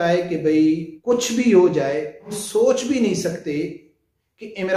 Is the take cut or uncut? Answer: cut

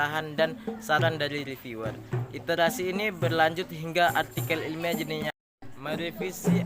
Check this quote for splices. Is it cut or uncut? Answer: cut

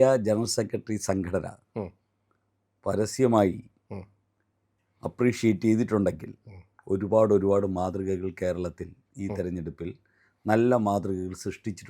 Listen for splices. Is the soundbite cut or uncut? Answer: uncut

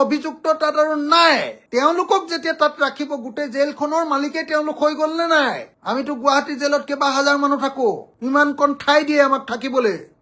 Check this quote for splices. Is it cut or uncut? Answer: uncut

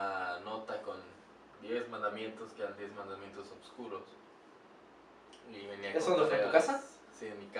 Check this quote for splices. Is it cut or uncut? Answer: uncut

